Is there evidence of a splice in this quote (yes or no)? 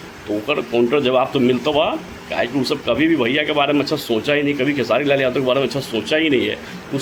no